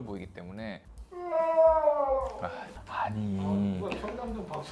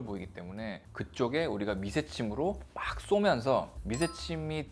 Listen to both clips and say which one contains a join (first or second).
first